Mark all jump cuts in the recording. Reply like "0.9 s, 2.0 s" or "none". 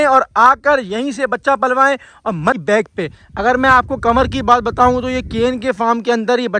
2.6 s